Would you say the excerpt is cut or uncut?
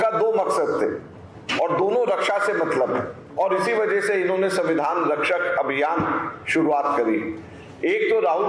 uncut